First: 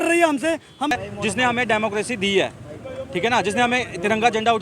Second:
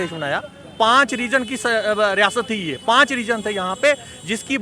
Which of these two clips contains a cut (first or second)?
first